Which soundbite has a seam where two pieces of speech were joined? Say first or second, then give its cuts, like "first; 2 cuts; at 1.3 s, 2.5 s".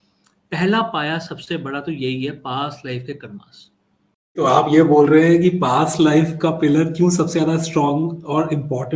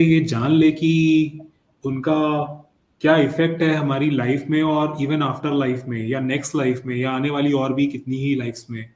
first; 1 cut; at 4.4 s